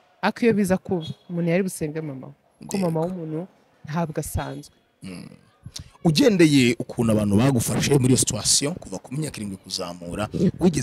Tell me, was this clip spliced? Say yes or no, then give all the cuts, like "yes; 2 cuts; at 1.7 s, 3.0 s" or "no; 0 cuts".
no; 0 cuts